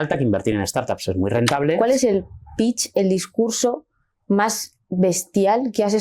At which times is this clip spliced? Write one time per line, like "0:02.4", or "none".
0:01.8